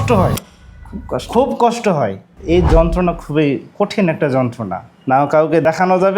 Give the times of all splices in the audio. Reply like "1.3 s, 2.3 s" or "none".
2.3 s